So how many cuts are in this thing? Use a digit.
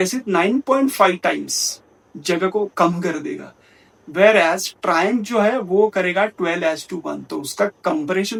0